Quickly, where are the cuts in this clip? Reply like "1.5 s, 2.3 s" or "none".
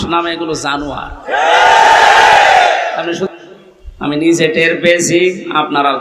3.3 s

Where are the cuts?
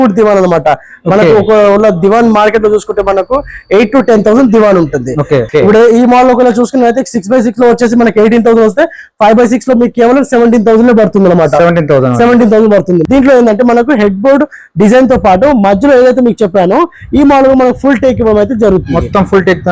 5.5 s, 13.0 s

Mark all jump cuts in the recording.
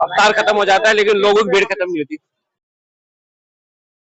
none

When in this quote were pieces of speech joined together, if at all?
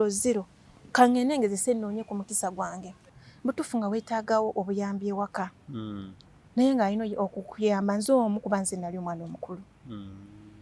3.0 s

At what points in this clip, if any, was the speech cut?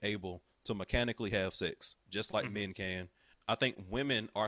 3.3 s

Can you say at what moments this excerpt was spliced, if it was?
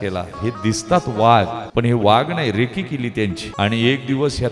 1.6 s, 3.5 s

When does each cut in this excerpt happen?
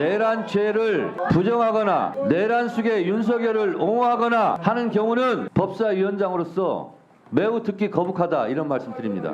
1.2 s, 2.1 s, 4.6 s, 5.5 s

